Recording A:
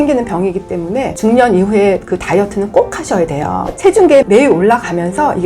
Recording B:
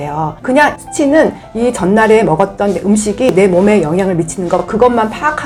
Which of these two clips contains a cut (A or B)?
A